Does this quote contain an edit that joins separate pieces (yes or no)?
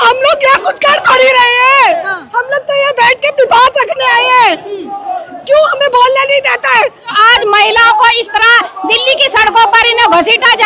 yes